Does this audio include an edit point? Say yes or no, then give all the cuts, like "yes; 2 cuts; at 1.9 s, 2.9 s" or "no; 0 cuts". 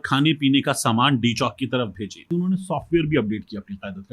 yes; 1 cut; at 2.3 s